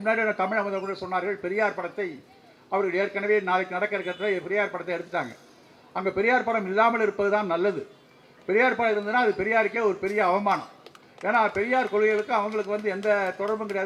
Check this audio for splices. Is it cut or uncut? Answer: uncut